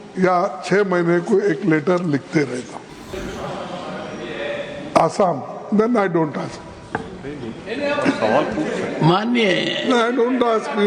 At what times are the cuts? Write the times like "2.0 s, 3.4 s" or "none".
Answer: 3.1 s